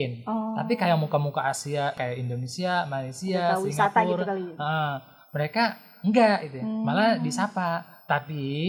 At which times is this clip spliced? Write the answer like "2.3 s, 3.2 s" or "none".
none